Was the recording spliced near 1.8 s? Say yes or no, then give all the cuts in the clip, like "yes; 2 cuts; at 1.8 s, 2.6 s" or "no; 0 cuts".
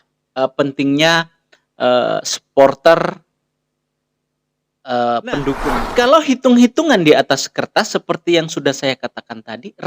no; 1 cut; at 5.8 s